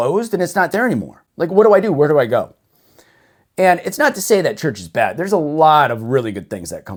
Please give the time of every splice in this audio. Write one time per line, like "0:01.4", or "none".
none